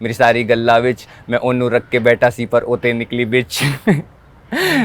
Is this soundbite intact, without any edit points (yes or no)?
yes